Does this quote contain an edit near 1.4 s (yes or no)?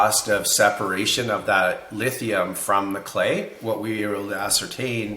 no